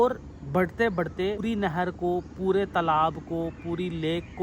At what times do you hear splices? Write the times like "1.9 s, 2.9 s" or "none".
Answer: 1.4 s